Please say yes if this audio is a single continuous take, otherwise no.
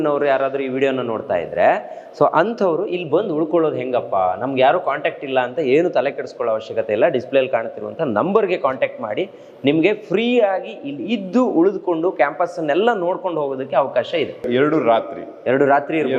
yes